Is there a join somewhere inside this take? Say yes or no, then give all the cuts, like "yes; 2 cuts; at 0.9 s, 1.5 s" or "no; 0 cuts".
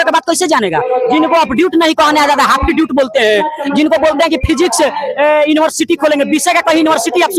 no; 0 cuts